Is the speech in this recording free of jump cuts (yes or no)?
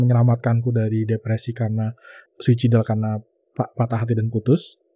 no